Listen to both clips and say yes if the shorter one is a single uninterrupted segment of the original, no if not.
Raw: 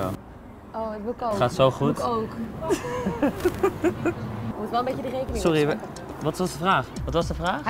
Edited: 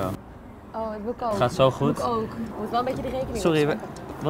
no